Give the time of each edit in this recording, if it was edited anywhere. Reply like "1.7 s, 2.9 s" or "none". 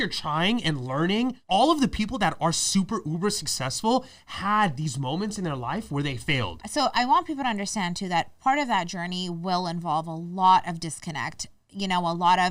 6.6 s